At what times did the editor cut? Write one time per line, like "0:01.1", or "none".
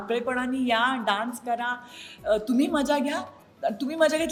none